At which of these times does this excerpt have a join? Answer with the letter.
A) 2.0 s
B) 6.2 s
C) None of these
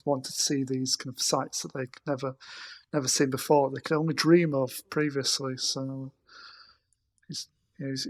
C